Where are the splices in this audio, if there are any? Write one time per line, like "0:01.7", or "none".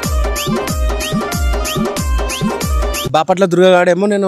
0:03.0